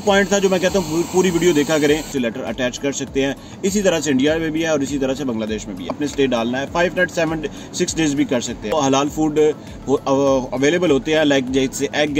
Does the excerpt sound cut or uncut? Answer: cut